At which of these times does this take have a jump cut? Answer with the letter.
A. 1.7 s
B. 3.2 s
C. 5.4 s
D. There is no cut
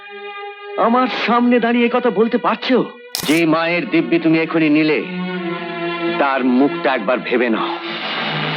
B